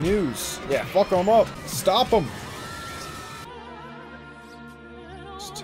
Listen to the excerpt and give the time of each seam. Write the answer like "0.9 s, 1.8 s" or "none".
1.6 s, 3.5 s